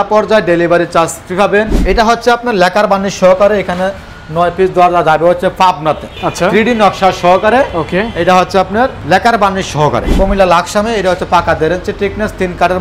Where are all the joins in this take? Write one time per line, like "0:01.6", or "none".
0:01.8
0:06.1
0:09.0
0:10.1